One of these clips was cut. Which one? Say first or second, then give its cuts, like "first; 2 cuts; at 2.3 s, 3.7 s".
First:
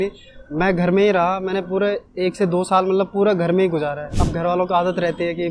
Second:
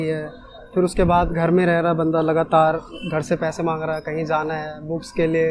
first; 1 cut; at 4.2 s